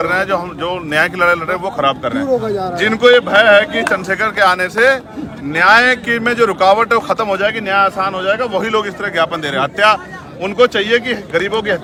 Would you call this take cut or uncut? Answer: uncut